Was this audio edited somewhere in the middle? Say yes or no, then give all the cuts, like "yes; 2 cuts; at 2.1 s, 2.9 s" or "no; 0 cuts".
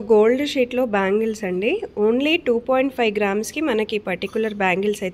no; 0 cuts